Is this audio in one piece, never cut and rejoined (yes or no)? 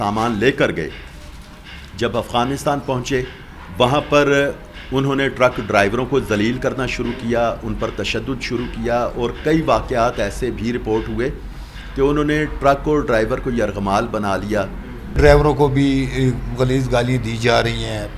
no